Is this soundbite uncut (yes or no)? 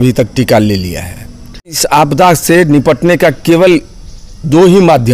no